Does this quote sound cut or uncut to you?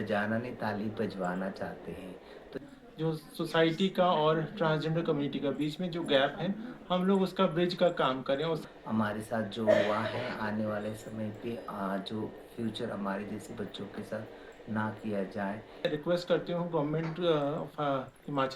cut